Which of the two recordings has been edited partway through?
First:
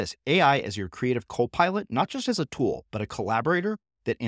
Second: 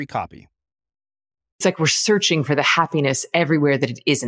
second; 1 cut; at 1.6 s

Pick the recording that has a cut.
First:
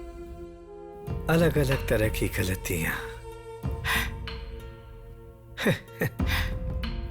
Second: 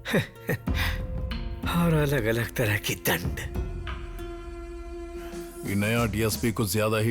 second; 1 cut; at 5.5 s

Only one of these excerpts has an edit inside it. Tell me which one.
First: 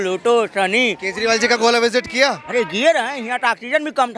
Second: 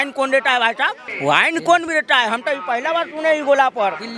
second; 1 cut; at 1.1 s

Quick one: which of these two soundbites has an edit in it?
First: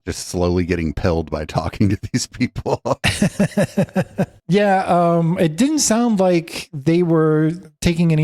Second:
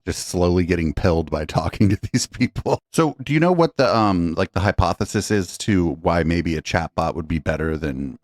second; 1 cut; at 2.8 s

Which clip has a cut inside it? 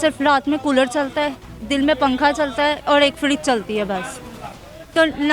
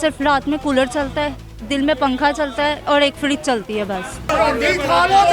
second; 1 cut; at 4.3 s

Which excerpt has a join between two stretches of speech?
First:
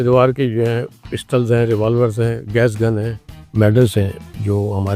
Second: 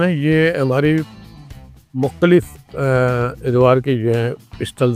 first; 1 cut; at 3.4 s

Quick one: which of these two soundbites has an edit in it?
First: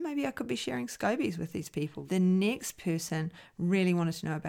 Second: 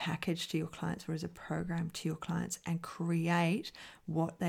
first; 1 cut; at 2.0 s

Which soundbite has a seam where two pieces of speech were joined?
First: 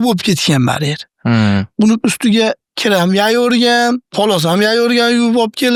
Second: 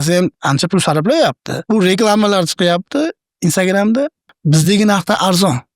second; 2 cuts; at 1.5 s, 4.3 s

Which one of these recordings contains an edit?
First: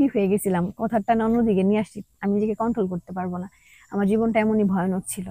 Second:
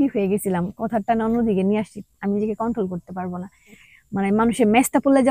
second; 1 cut; at 3.8 s

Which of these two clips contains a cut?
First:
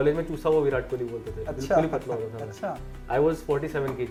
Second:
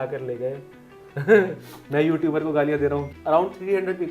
second; 1 cut; at 3.1 s

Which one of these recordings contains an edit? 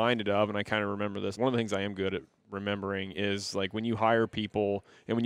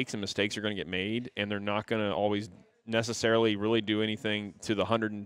first; 1 cut; at 1.3 s

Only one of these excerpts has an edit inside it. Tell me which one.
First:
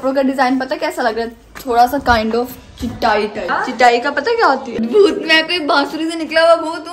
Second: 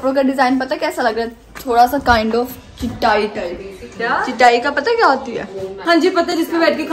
first; 2 cuts; at 3.5 s, 4.8 s

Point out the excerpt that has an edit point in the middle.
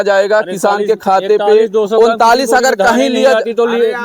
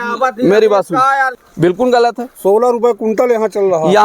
second; 1 cut; at 1.4 s

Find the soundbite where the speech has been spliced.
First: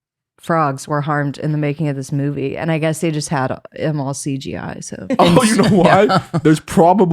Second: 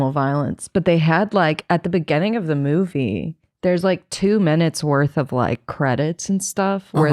first; 2 cuts; at 5.0 s, 6.3 s

